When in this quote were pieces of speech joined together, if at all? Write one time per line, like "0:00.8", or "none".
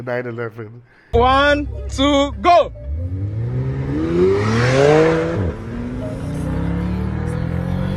0:01.0